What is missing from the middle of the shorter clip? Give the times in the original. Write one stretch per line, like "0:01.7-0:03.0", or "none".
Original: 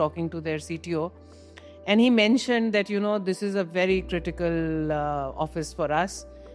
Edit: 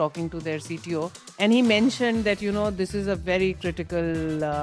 0:01.2-0:01.7